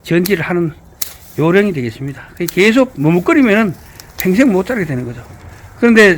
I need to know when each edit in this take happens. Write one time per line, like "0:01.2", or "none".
none

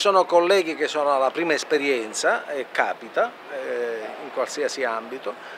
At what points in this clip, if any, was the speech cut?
none

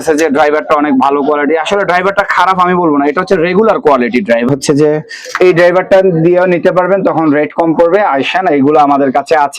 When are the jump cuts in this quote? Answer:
0:04.5

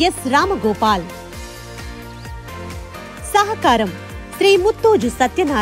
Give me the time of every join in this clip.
0:01.1
0:03.3

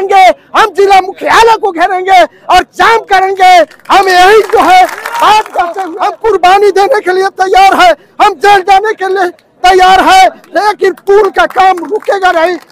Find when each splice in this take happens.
0:05.8

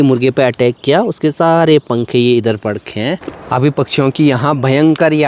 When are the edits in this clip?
0:03.2

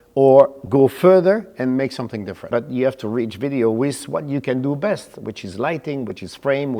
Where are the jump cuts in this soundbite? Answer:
0:02.4

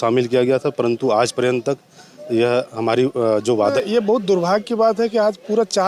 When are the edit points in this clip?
0:03.7

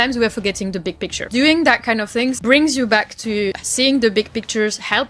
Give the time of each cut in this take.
0:01.2
0:02.4
0:03.6

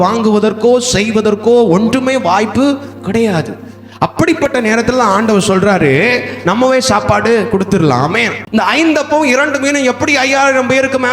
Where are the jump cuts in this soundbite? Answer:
0:08.4

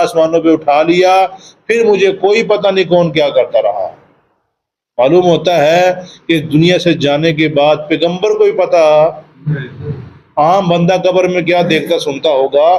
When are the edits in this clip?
none

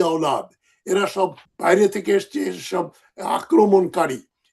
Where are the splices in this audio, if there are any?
0:01.5

